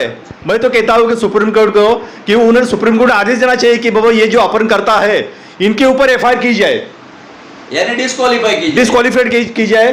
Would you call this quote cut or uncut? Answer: uncut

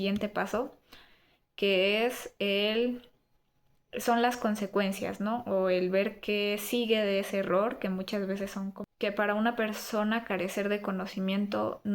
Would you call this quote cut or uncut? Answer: cut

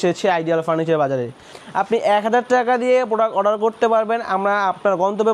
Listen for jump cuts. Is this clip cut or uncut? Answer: cut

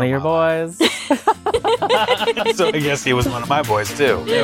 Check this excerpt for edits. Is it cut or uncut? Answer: uncut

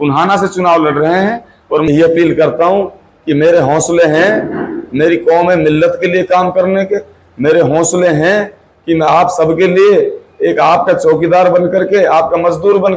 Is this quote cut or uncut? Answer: cut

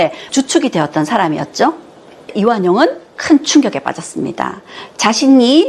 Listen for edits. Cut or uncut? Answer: cut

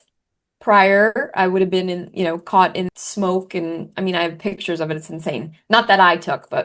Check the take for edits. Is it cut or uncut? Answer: cut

